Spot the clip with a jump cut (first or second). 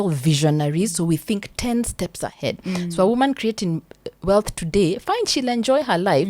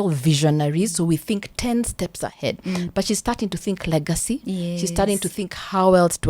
second